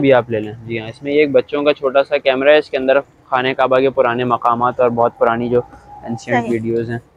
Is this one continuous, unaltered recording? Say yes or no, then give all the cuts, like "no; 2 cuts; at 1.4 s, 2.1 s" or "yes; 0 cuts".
yes; 0 cuts